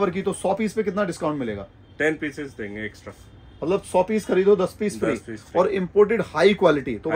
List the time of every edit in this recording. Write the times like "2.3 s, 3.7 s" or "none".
none